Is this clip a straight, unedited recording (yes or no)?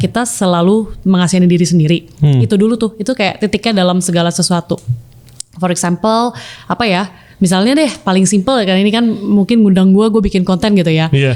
yes